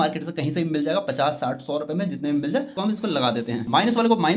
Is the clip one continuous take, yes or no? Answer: no